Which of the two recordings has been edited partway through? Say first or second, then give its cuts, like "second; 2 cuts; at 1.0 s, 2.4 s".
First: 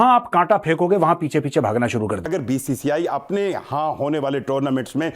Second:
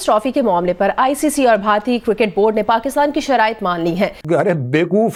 first; 1 cut; at 2.3 s